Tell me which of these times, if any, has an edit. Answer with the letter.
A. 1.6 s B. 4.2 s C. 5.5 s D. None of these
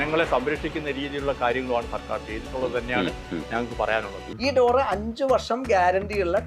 B